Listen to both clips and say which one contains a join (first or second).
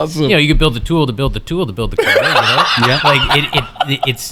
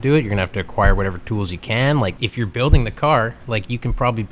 second